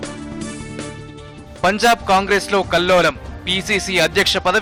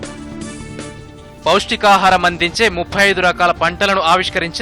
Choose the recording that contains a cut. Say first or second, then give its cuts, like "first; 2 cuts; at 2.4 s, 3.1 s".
second; 1 cut; at 1.0 s